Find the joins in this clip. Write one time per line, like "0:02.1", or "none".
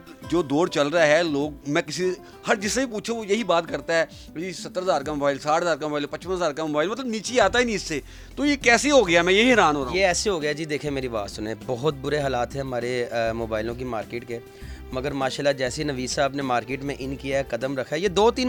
none

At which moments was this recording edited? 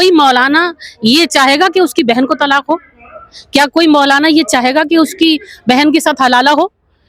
none

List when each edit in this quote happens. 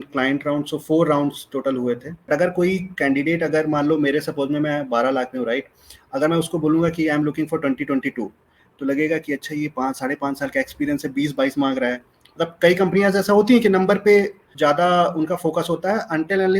0:02.3
0:14.5

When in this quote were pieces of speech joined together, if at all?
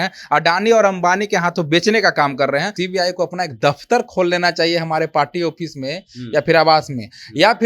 0:02.8

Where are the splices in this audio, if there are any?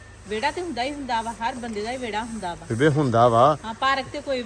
none

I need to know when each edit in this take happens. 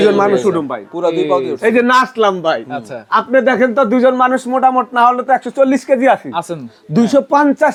none

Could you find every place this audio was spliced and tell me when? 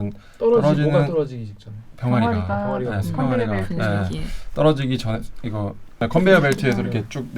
0:06.0

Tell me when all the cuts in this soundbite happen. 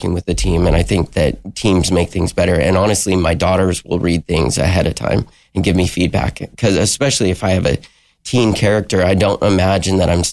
none

